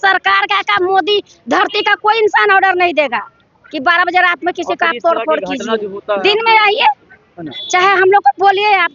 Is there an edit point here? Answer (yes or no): no